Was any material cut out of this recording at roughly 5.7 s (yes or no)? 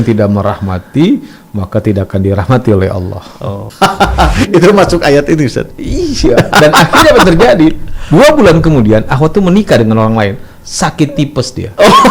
no